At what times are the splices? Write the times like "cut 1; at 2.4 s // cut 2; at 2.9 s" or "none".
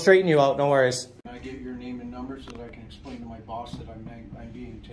cut 1; at 1.3 s